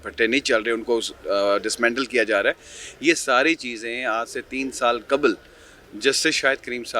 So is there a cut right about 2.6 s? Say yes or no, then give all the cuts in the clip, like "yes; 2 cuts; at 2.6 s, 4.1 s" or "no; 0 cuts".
no; 0 cuts